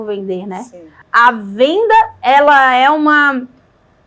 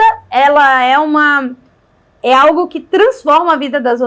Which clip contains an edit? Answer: first; 1 cut; at 0.9 s

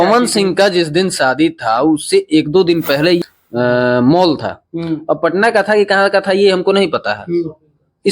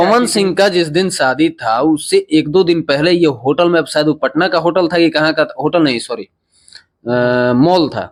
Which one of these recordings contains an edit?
first; 1 cut; at 3.2 s

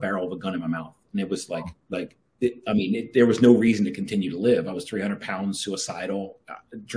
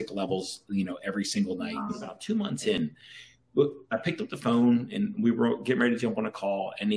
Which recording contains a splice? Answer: second; 1 cut; at 2.1 s

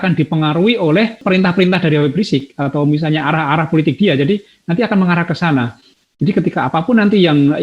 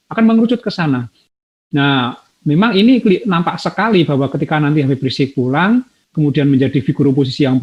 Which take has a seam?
first; 1 cut; at 1.2 s

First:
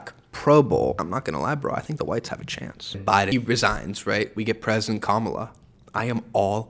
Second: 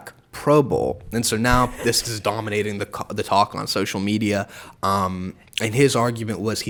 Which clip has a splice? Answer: first; 2 cuts; at 1.0 s, 3.3 s

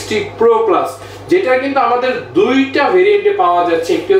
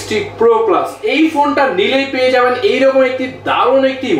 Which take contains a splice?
second; 1 cut; at 1.0 s

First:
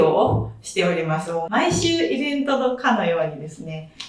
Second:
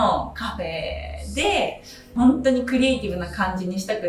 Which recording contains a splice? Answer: second; 1 cut; at 1.9 s

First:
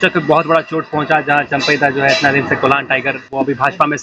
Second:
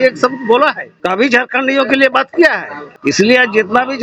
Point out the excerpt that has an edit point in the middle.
second; 2 cuts; at 0.9 s, 2.9 s

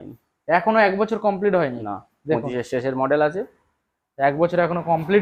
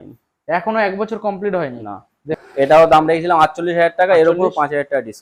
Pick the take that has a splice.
second; 1 cut; at 2.4 s

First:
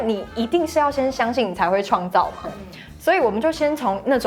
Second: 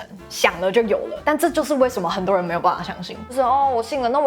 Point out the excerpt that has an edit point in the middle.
second; 2 cuts; at 1.1 s, 3.3 s

